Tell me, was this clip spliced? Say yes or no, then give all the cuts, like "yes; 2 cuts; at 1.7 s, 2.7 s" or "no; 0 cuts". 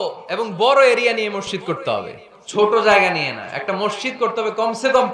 no; 0 cuts